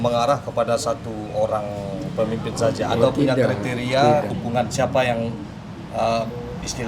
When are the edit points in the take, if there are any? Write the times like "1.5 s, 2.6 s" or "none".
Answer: 4.3 s